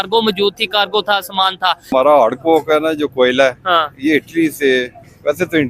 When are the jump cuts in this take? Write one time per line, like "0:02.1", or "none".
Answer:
0:01.9